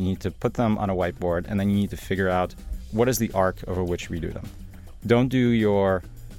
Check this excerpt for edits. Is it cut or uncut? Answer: cut